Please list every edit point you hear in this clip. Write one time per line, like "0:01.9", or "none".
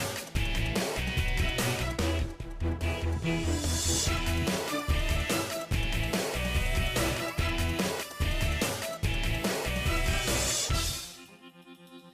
0:07.6